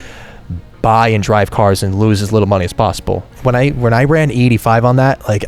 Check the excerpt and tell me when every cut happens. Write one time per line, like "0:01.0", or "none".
0:03.4